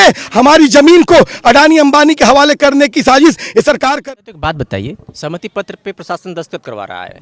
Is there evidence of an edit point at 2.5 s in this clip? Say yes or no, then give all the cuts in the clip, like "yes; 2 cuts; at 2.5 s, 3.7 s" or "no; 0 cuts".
no; 1 cut; at 3.9 s